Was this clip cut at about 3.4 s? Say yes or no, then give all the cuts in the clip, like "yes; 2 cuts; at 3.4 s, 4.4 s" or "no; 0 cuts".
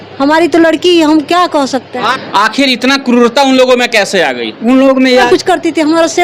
no; 2 cuts; at 2.2 s, 5.3 s